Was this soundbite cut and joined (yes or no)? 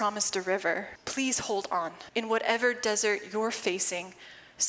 yes